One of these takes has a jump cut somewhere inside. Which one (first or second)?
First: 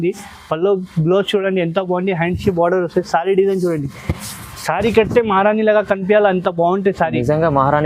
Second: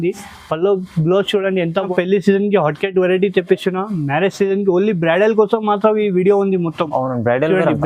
second